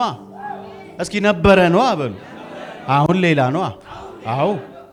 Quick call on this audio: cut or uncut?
uncut